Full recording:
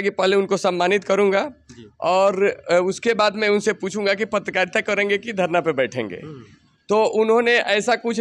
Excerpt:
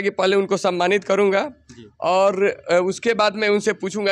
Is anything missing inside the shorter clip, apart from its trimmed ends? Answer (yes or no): no